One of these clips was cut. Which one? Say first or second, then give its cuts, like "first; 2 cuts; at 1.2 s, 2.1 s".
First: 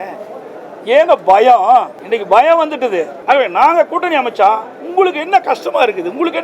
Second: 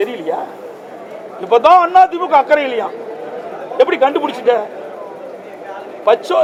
first; 2 cuts; at 2.0 s, 3.1 s